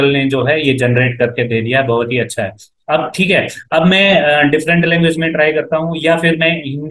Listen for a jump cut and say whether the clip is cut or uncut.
uncut